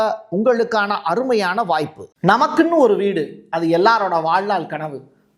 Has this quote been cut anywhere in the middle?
yes; 1 cut; at 2.0 s

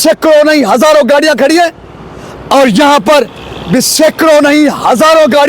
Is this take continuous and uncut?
yes; 0 cuts

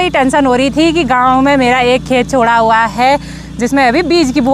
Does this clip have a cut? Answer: no; 0 cuts

